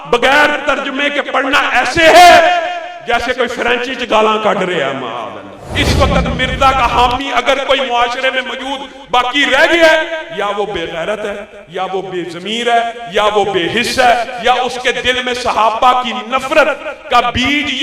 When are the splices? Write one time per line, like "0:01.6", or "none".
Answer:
0:05.6